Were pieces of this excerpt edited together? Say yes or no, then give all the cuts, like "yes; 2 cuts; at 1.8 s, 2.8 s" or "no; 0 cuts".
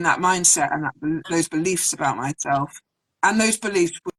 no; 0 cuts